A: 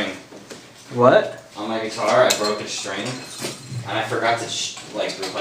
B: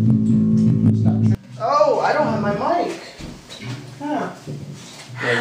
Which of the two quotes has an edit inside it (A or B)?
B